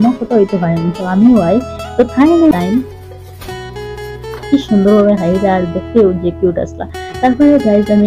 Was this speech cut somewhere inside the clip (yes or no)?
yes